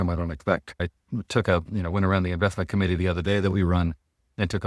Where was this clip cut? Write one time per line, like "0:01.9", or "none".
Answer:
0:00.9

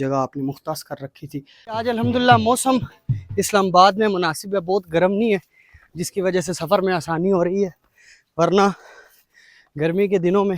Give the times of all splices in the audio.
0:01.8

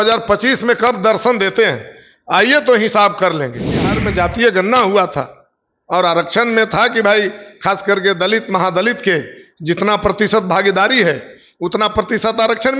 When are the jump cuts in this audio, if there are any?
0:04.0

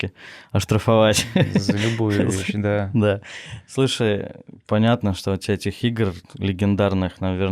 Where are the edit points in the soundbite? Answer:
none

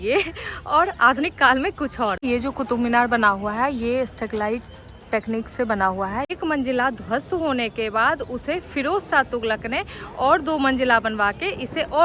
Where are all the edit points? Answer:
0:02.2
0:06.3

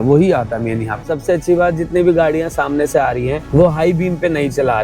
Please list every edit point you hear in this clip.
0:01.0
0:03.4

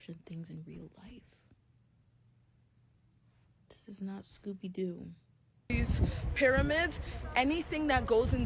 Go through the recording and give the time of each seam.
0:05.7

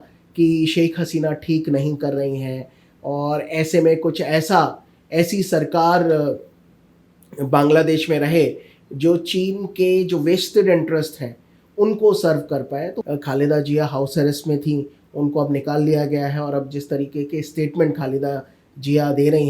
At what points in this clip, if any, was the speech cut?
0:12.9

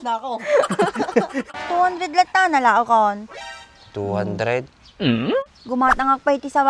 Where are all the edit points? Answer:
0:01.5
0:05.6

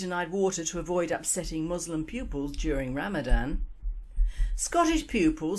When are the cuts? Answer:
0:03.3

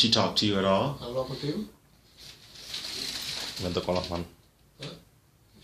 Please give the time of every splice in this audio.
0:00.9

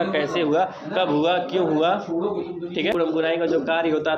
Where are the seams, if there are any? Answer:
0:02.9

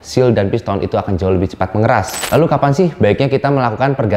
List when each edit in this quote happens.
0:02.2

